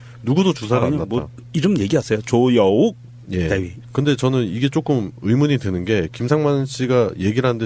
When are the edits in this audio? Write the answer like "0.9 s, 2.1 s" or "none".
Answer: none